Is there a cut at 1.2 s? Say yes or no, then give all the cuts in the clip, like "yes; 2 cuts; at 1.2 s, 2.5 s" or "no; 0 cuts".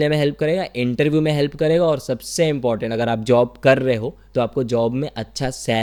no; 0 cuts